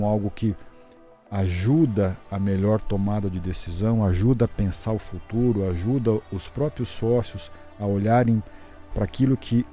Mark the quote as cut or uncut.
uncut